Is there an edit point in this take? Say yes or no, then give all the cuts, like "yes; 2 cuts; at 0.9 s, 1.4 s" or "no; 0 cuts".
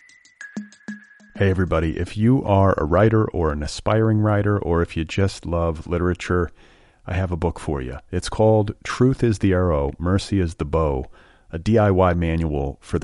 yes; 1 cut; at 0.9 s